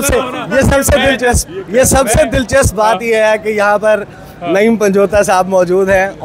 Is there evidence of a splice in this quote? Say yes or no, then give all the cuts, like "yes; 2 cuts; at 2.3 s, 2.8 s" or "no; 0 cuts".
no; 0 cuts